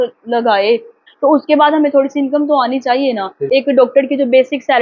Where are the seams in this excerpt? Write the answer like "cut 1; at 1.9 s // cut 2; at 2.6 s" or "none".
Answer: cut 1; at 1.0 s // cut 2; at 3.3 s